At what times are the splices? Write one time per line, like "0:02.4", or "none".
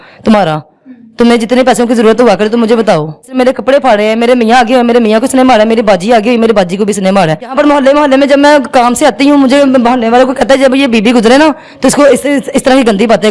0:03.3
0:07.5